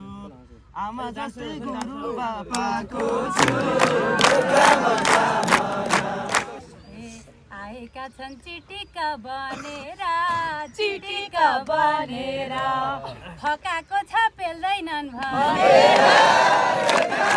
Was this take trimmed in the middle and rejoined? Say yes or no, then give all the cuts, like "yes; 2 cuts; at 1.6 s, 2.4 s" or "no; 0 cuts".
yes; 1 cut; at 6.6 s